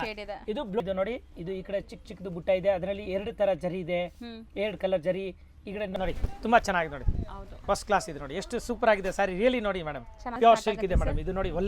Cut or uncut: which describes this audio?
cut